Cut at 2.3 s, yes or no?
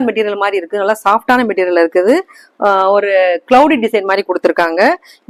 no